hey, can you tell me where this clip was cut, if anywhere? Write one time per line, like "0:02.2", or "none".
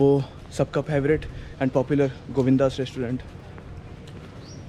none